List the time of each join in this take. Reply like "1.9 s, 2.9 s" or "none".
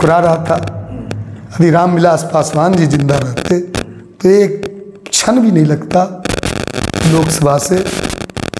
none